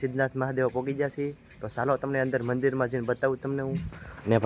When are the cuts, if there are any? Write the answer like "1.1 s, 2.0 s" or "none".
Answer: none